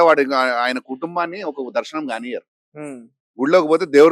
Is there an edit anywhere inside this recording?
no; 0 cuts

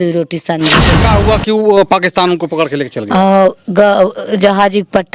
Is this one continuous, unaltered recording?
no; 1 cut; at 0.9 s

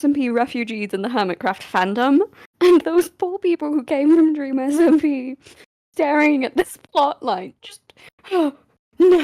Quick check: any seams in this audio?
yes; 1 cut; at 2.4 s

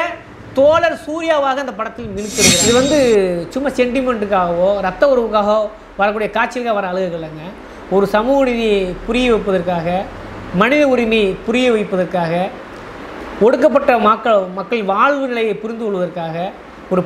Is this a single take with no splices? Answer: no; 1 cut; at 2.6 s

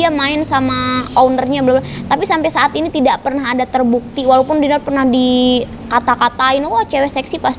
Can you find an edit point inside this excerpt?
no; 0 cuts

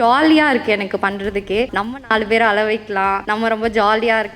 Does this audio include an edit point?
yes; 2 cuts; at 1.8 s, 3.2 s

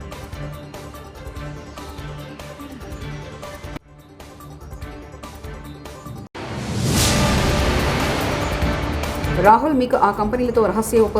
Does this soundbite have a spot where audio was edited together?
yes; 1 cut; at 9.2 s

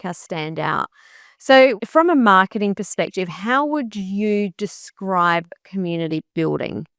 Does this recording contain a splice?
no; 0 cuts

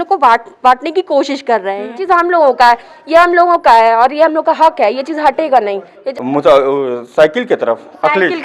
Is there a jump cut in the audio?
yes; 2 cuts; at 2.0 s, 5.9 s

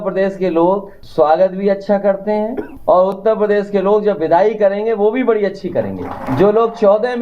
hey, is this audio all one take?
no; 3 cuts; at 1.0 s, 2.7 s, 6.2 s

